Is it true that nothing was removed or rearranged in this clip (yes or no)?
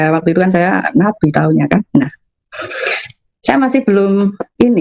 yes